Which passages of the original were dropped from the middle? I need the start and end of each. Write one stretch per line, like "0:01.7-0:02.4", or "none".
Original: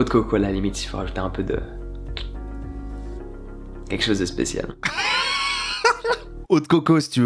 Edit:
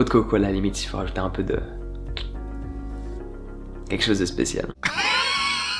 none